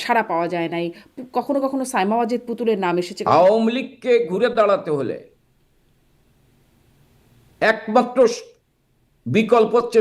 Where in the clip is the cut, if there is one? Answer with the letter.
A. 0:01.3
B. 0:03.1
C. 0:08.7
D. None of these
B